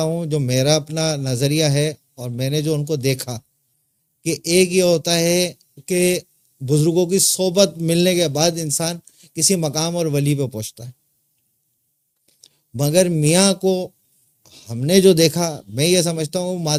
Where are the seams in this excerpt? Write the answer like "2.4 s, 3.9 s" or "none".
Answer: none